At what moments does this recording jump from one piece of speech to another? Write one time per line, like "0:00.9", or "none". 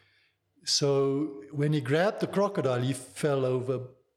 none